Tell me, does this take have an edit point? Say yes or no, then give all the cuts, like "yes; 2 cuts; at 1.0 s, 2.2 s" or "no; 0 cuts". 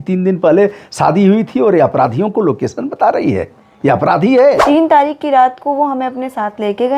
yes; 1 cut; at 4.6 s